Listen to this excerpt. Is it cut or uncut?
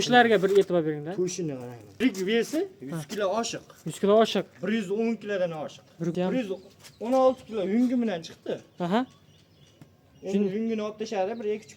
cut